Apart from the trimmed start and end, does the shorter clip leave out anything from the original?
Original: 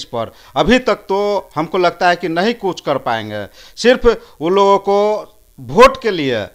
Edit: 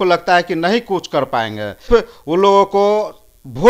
yes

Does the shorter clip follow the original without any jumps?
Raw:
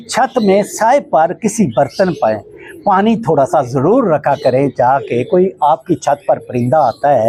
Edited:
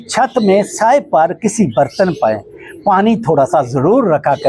yes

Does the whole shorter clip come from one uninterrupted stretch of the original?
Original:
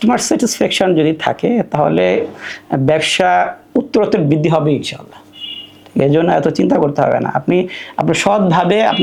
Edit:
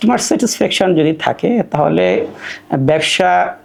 yes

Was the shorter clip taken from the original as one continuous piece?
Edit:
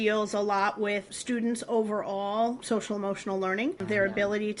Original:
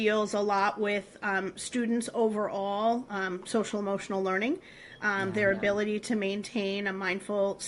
no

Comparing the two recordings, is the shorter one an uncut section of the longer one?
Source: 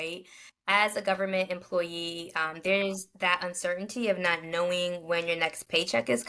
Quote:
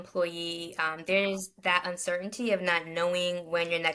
yes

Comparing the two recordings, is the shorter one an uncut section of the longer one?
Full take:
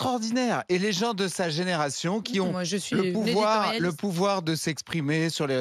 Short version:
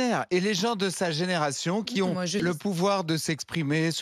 no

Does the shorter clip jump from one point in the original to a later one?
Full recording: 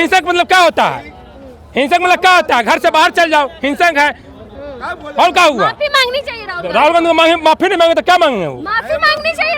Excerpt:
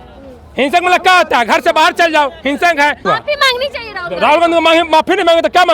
yes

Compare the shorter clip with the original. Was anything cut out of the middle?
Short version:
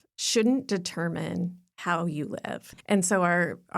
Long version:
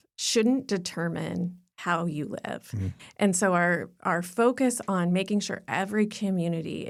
yes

